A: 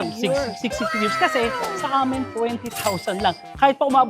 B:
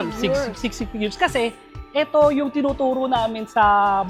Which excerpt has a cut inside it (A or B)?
A